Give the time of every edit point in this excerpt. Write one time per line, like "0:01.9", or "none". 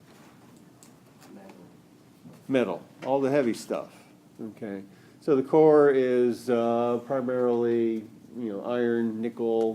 0:07.1